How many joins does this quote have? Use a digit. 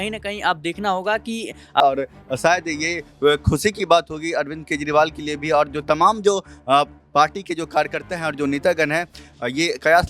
1